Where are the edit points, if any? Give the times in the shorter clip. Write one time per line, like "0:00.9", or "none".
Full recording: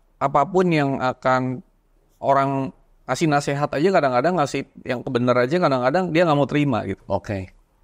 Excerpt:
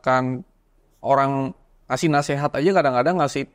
none